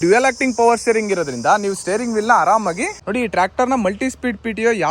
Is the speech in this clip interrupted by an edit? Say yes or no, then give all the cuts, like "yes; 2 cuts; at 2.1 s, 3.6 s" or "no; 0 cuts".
yes; 1 cut; at 2.9 s